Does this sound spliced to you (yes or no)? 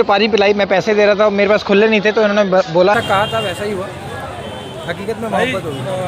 yes